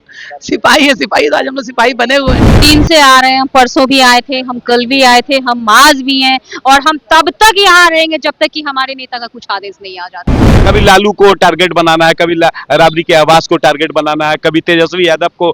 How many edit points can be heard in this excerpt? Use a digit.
2